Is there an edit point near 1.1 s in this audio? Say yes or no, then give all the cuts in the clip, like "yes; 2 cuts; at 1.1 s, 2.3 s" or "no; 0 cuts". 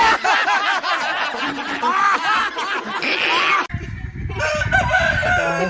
no; 0 cuts